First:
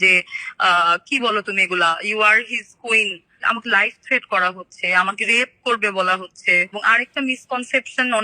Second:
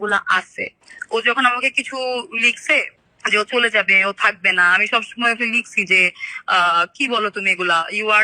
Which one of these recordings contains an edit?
first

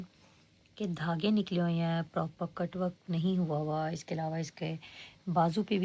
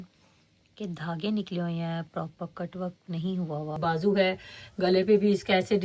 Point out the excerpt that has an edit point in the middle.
second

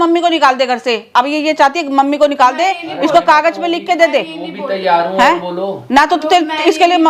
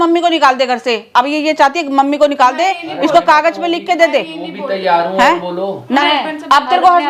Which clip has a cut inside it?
second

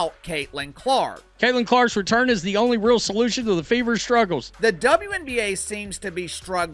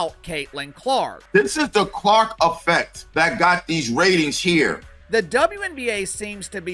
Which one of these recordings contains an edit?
second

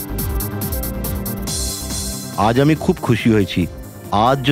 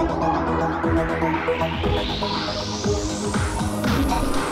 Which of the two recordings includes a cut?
first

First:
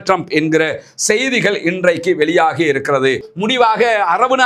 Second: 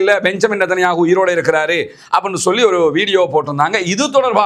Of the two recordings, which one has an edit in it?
first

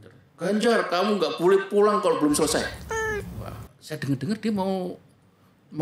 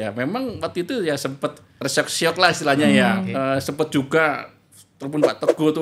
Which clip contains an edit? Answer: second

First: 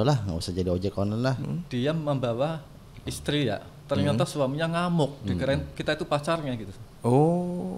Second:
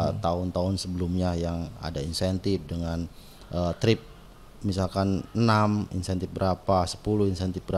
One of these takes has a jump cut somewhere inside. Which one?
first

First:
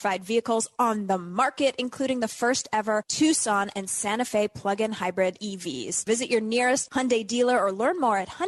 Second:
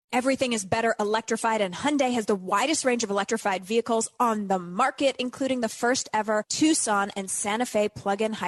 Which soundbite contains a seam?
first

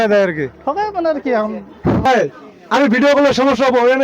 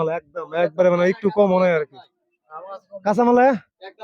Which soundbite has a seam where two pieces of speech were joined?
first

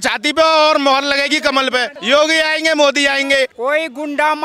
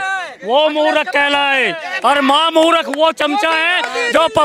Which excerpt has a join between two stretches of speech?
first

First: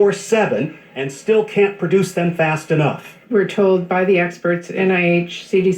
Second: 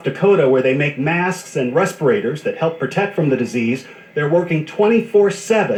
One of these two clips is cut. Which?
first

